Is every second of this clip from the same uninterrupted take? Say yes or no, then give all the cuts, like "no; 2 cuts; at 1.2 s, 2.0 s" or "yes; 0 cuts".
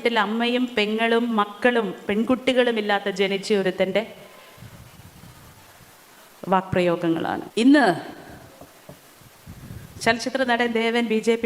no; 1 cut; at 7.4 s